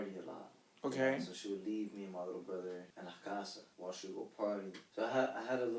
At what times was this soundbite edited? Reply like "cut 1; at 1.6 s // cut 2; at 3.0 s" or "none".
cut 1; at 2.9 s // cut 2; at 3.7 s // cut 3; at 4.8 s